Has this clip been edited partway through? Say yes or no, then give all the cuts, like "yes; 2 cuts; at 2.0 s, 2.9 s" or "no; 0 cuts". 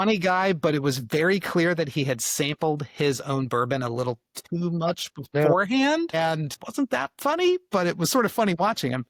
no; 0 cuts